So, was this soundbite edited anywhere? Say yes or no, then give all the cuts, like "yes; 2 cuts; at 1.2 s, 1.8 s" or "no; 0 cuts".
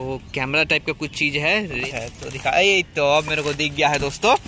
yes; 1 cut; at 1.8 s